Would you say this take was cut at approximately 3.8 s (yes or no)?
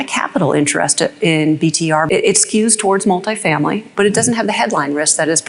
yes